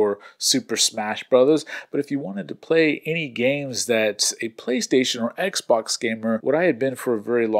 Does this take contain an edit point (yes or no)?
yes